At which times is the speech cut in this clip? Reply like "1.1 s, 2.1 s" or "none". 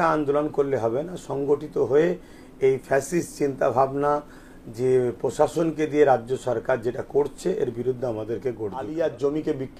8.9 s